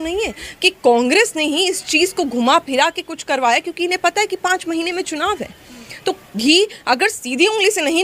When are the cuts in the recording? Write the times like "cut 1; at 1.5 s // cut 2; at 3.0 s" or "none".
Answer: none